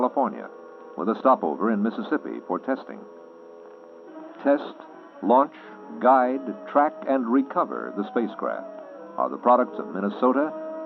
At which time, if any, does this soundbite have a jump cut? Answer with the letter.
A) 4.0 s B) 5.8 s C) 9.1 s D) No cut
D